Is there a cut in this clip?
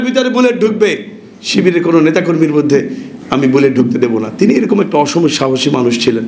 no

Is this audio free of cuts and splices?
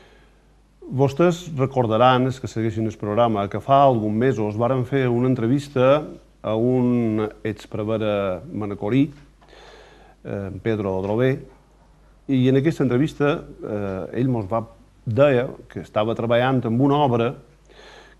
yes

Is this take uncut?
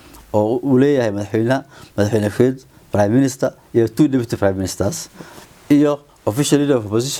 yes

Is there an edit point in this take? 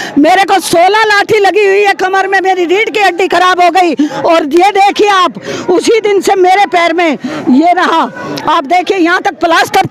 no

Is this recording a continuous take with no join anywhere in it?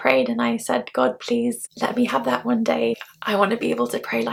yes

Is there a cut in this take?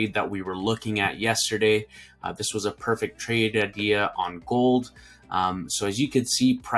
no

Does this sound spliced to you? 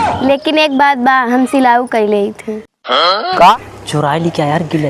yes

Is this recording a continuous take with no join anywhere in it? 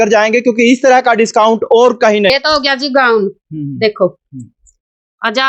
no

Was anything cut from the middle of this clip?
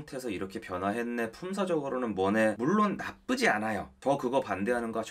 no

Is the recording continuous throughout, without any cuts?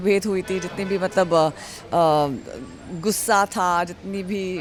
yes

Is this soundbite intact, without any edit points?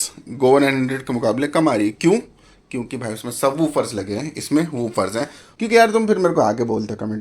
no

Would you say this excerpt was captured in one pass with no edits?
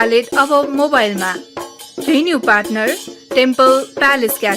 no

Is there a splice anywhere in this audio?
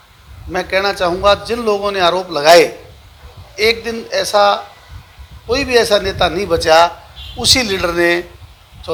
no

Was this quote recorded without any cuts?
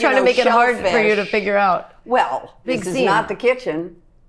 no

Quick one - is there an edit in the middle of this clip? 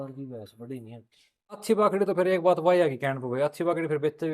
yes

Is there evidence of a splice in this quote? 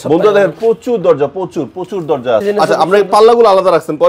yes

